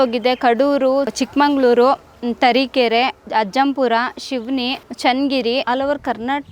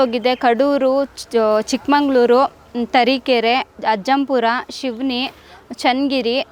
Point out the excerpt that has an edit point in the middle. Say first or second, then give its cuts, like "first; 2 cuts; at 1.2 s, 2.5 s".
first; 3 cuts; at 1.2 s, 4.8 s, 5.6 s